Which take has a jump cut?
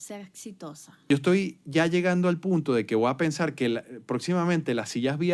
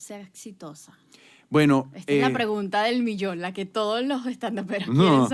first; 1 cut; at 1.1 s

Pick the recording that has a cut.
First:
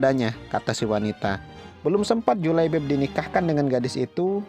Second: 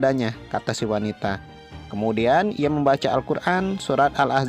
first; 1 cut; at 1.7 s

